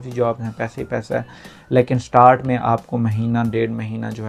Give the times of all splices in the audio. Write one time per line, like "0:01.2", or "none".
none